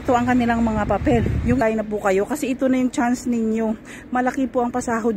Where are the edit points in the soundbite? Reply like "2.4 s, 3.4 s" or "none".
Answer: 1.6 s